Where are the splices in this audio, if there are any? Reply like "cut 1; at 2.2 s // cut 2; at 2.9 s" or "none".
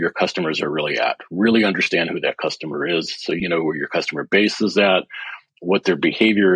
cut 1; at 3.4 s